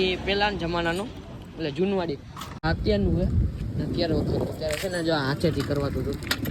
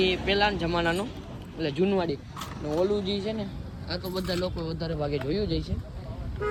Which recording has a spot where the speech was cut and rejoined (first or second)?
first